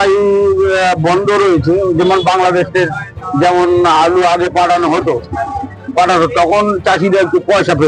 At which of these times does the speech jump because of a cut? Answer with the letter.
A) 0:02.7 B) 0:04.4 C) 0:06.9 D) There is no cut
D